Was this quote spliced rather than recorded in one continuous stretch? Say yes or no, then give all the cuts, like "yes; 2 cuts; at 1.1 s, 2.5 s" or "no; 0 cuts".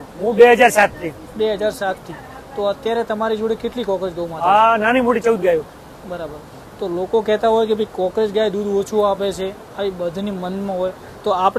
no; 0 cuts